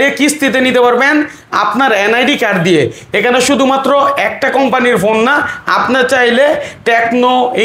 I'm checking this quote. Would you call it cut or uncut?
uncut